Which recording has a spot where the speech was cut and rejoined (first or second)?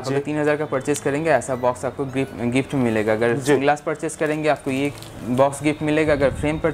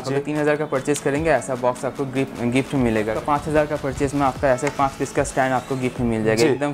second